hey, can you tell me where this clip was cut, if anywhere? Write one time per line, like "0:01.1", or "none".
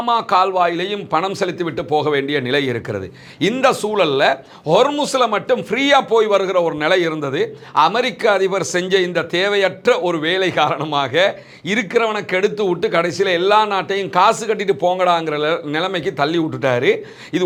none